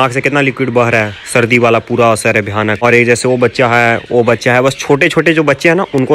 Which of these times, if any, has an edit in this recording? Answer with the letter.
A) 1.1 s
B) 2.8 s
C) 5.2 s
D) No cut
D